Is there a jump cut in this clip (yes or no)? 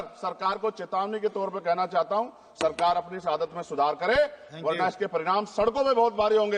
no